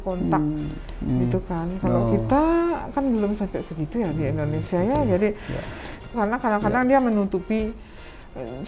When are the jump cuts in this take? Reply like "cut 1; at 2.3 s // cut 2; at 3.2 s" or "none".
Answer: none